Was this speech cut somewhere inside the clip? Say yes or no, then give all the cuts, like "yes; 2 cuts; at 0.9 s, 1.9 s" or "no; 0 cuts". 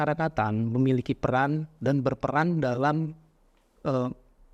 no; 0 cuts